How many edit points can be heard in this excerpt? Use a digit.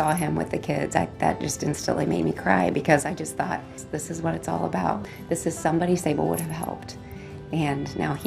0